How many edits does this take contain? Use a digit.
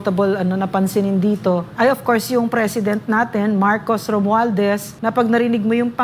2